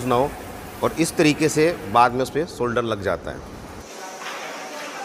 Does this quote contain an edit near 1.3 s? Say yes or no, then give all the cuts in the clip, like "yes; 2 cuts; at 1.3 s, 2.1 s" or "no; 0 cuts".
no; 1 cut; at 3.8 s